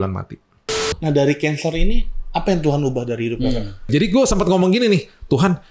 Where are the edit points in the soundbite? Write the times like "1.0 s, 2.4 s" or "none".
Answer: 0.9 s, 3.9 s